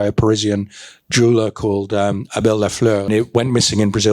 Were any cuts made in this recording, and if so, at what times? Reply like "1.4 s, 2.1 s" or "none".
3.1 s